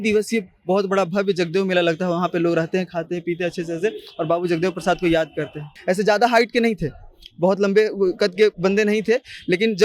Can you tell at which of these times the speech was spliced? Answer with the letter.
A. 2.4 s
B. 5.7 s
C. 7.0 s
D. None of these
B